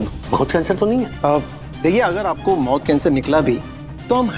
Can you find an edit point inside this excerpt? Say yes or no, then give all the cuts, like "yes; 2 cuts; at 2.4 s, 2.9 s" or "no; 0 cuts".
yes; 1 cut; at 1.1 s